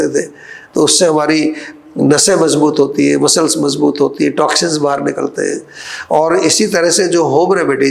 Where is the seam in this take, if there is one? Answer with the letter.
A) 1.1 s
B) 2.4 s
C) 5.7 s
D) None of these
D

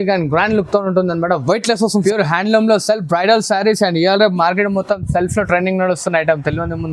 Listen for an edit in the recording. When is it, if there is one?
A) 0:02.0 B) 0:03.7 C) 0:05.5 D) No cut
A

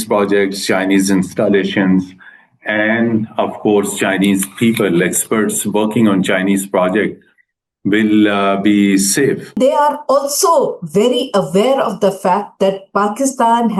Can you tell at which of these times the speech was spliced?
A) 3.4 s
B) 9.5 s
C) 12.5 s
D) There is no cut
B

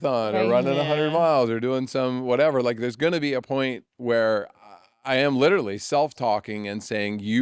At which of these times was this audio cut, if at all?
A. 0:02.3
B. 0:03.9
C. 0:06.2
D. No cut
D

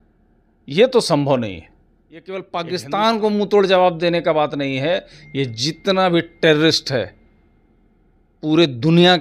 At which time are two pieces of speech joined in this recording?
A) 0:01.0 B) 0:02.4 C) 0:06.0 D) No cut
B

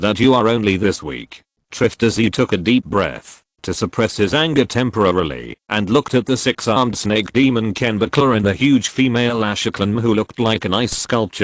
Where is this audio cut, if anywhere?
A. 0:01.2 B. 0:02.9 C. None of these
A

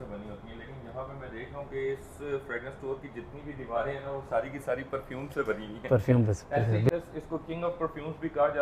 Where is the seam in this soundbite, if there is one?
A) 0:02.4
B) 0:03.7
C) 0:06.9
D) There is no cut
C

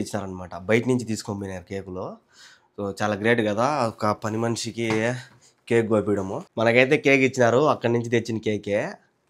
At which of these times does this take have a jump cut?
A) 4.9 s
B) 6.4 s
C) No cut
B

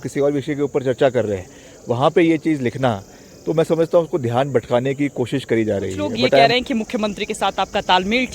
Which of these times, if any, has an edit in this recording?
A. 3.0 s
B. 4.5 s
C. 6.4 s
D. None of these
C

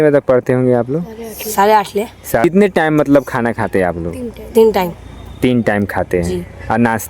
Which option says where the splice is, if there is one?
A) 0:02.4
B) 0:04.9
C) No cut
A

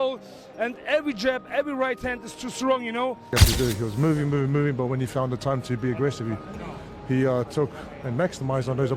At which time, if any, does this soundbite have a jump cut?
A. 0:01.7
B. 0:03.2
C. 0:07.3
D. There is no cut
B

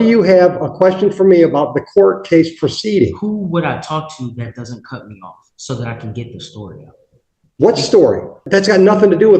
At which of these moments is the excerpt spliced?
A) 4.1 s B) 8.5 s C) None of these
B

